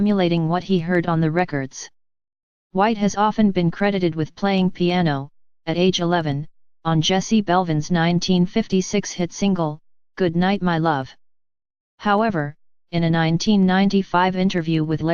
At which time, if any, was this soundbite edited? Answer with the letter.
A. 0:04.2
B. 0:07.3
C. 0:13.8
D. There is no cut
D